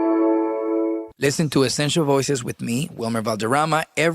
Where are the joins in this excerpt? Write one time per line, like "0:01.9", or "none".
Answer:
0:01.1